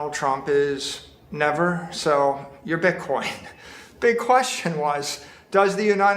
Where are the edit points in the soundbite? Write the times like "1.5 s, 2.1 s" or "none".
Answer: 3.7 s